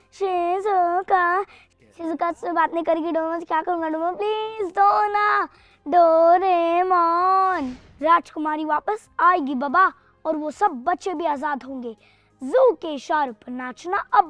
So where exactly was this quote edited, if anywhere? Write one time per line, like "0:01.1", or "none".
0:07.8